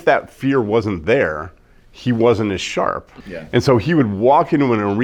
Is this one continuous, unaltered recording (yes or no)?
yes